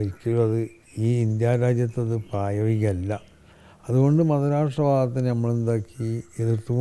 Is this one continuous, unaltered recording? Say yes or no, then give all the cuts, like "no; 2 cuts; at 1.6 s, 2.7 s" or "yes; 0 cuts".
yes; 0 cuts